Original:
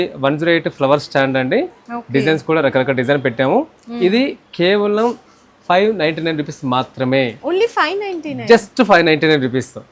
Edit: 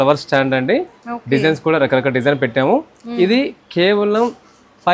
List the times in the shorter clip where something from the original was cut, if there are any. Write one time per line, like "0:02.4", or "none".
none